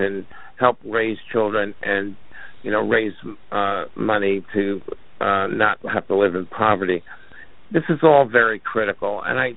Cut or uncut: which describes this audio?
uncut